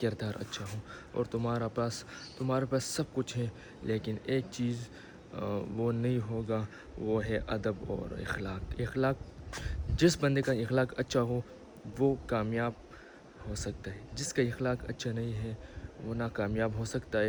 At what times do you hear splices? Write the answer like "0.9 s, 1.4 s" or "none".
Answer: none